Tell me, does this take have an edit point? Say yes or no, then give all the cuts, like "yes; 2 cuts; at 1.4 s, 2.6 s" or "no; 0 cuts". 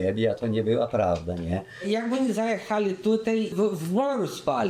yes; 2 cuts; at 1.7 s, 3.5 s